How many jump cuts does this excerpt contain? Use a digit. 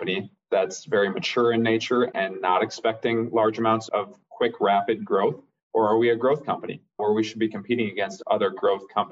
1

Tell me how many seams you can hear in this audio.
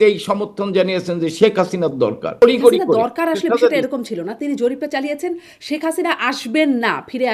1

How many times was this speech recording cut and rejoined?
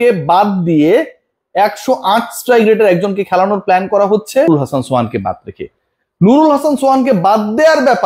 1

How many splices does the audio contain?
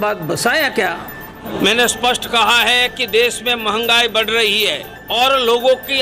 2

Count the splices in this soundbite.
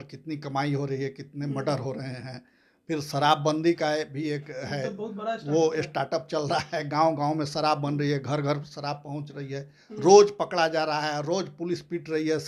0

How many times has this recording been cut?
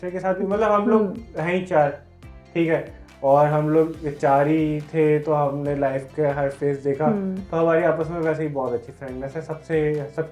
0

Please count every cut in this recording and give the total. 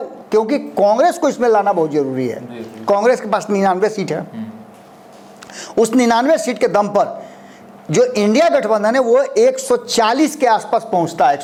0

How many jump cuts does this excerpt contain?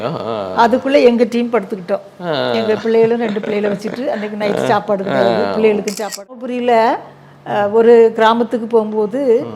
1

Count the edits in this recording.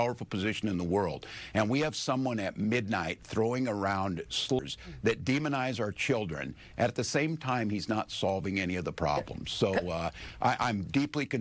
1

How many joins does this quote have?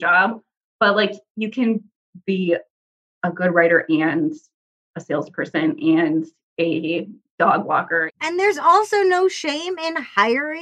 2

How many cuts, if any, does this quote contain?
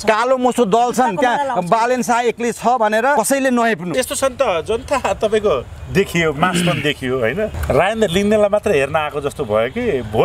3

